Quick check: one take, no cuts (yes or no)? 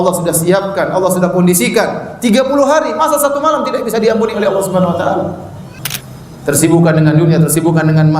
no